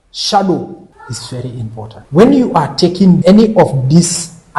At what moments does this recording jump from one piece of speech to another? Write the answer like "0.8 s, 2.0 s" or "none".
0.9 s, 2.0 s, 3.2 s